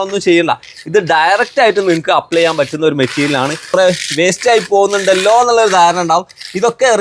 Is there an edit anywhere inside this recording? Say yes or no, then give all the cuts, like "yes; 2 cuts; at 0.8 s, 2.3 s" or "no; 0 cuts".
yes; 1 cut; at 3.7 s